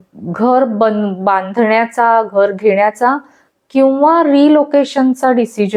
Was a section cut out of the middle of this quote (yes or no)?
no